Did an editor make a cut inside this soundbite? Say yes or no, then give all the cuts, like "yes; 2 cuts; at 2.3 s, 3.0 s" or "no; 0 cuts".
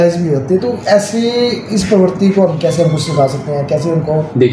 no; 0 cuts